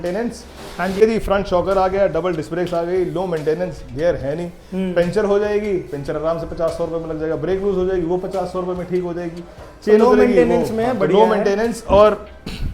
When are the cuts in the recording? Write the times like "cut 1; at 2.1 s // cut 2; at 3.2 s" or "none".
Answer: cut 1; at 1.0 s